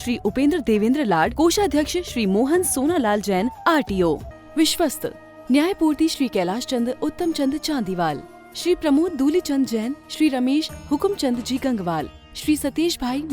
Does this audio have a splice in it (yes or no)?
yes